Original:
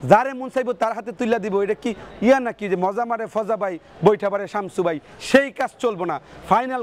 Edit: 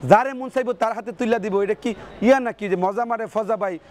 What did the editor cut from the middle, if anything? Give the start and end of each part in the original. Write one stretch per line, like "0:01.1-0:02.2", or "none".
none